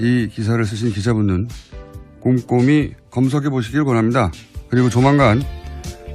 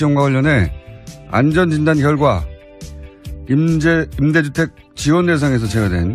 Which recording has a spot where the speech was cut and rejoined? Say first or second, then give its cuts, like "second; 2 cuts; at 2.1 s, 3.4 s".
first; 1 cut; at 3.6 s